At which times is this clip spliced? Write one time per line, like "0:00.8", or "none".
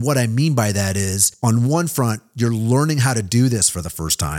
0:01.2